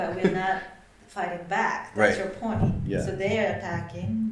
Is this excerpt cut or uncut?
uncut